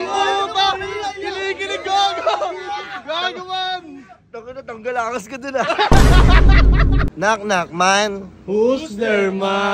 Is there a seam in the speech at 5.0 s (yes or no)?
no